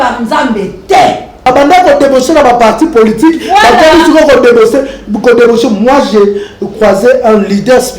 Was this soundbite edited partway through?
yes; 1 cut; at 1.4 s

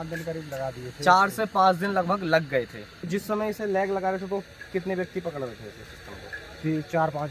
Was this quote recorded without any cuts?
no; 1 cut; at 3.1 s

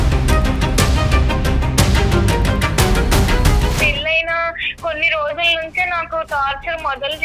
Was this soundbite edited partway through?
yes; 1 cut; at 3.8 s

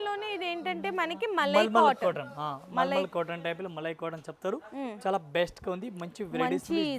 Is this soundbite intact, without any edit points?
yes; 0 cuts

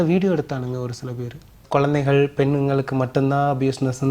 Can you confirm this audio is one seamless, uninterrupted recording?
no; 1 cut; at 1.6 s

